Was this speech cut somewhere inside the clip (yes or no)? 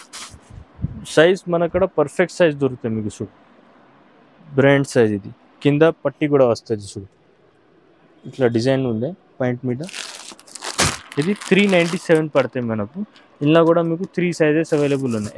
no